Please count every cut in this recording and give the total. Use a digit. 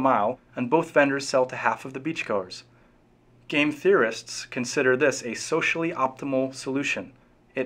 0